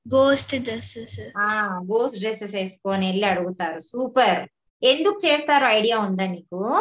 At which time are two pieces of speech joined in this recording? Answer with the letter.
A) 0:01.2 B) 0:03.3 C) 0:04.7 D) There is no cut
D